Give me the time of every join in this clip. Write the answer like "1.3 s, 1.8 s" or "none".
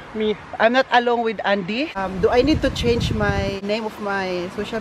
1.9 s, 3.6 s